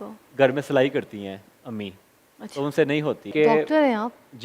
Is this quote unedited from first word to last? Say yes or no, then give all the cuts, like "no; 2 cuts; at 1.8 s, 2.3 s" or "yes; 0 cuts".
no; 1 cut; at 3.3 s